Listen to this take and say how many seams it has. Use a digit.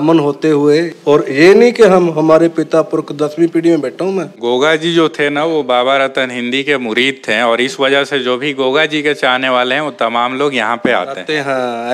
2